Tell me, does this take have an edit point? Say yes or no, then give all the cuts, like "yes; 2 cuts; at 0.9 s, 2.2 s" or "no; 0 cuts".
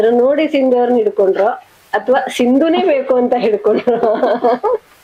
no; 0 cuts